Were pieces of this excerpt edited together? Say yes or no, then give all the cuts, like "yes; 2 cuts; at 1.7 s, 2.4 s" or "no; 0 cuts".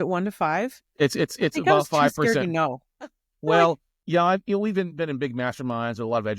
yes; 1 cut; at 3.9 s